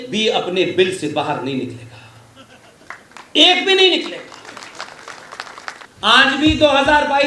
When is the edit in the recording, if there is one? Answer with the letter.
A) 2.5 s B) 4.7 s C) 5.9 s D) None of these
C